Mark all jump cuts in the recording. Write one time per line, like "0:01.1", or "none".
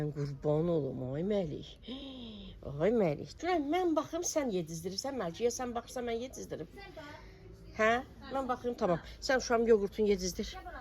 0:03.3